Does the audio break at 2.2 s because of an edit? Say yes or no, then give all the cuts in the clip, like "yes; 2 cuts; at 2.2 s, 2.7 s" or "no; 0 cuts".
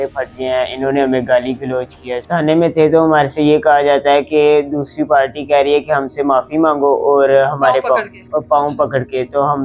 yes; 1 cut; at 2.2 s